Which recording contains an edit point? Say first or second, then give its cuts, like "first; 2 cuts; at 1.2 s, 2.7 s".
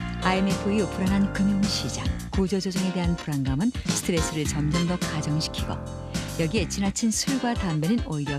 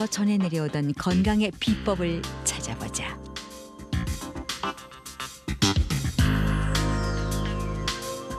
first; 1 cut; at 2.1 s